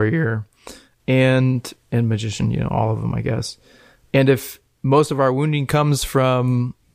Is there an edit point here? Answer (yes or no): no